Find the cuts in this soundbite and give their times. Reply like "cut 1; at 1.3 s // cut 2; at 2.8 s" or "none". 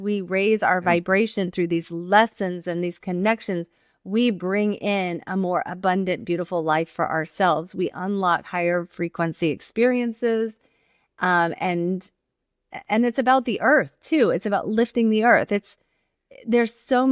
none